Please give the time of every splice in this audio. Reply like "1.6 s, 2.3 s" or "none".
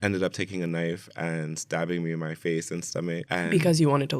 3.2 s